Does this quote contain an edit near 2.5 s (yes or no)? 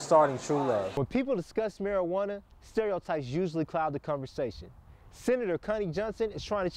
no